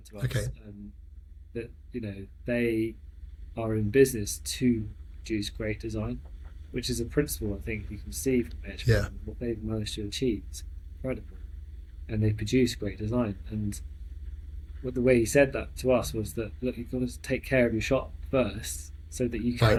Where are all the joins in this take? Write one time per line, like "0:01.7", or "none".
none